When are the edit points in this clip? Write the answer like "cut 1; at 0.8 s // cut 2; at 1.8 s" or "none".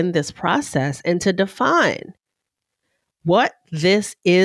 none